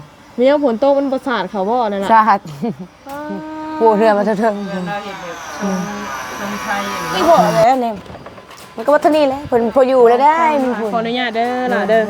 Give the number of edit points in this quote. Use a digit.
1